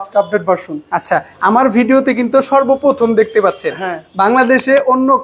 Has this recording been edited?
no; 0 cuts

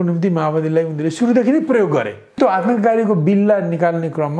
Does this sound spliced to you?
yes; 1 cut; at 2.4 s

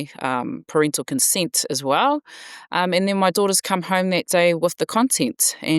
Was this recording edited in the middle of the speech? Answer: no; 0 cuts

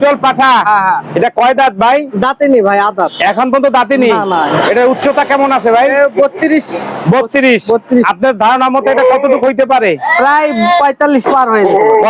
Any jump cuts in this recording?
no; 0 cuts

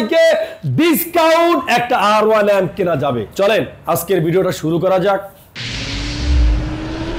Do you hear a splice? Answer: no; 0 cuts

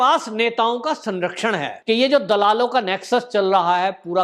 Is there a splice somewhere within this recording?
yes; 1 cut; at 1.7 s

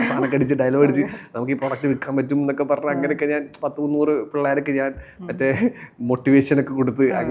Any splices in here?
no; 0 cuts

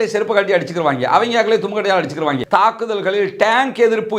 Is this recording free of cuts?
no; 1 cut; at 2.4 s

